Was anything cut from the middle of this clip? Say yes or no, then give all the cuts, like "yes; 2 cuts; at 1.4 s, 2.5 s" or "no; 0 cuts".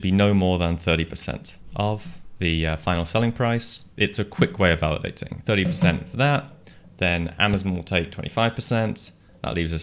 yes; 3 cuts; at 1.5 s, 2.2 s, 3.8 s